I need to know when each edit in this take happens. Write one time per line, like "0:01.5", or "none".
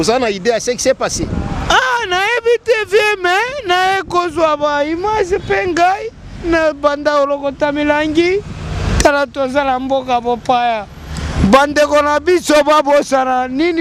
none